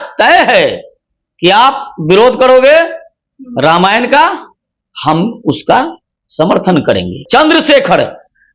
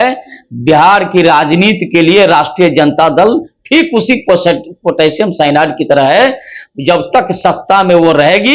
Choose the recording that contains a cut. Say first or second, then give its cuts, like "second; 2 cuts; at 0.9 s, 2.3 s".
first; 1 cut; at 7.2 s